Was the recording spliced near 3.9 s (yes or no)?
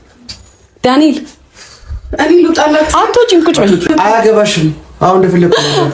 yes